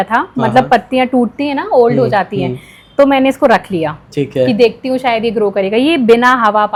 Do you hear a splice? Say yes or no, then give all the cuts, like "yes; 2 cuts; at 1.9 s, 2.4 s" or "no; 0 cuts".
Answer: no; 0 cuts